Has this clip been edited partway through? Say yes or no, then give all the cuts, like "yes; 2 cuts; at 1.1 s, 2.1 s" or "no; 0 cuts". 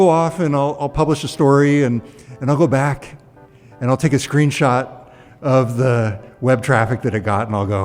no; 0 cuts